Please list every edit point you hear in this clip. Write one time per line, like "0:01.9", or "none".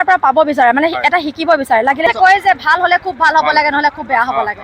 0:02.1